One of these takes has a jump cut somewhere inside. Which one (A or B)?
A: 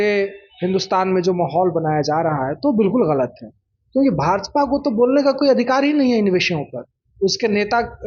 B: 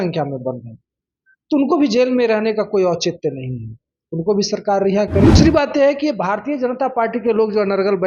B